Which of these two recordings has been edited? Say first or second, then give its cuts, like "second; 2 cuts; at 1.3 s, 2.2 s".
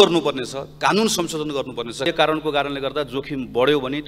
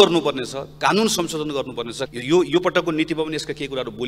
first; 1 cut; at 2.1 s